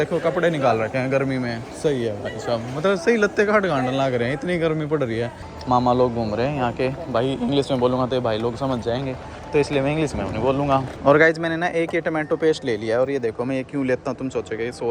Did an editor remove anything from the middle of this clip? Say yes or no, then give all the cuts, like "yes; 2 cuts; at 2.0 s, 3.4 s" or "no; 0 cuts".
yes; 2 cuts; at 5.4 s, 10.9 s